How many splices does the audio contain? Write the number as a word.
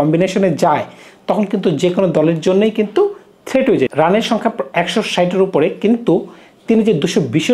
one